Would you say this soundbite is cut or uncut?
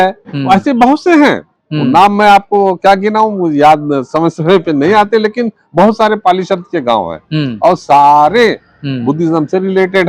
uncut